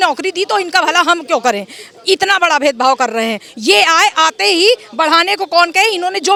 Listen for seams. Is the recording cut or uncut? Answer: uncut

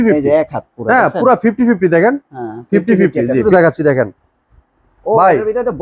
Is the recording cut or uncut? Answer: cut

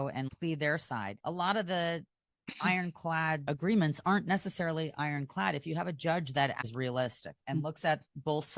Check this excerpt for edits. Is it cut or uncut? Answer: cut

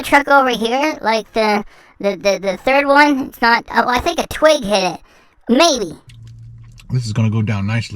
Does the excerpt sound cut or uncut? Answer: cut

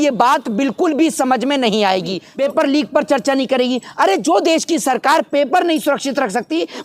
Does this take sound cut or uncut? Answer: cut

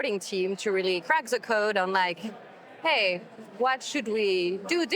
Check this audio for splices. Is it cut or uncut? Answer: cut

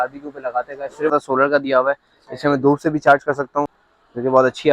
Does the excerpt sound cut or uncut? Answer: cut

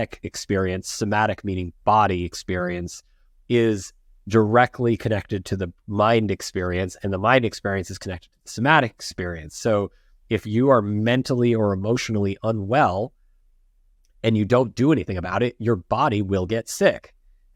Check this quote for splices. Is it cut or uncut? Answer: uncut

